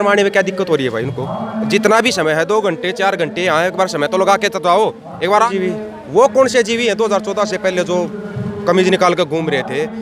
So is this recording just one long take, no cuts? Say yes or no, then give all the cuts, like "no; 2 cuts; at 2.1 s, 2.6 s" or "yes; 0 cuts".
no; 1 cut; at 5.5 s